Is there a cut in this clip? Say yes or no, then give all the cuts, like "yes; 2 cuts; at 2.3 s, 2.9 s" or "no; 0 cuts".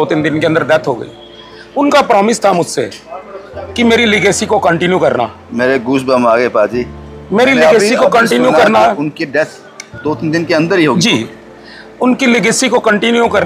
no; 0 cuts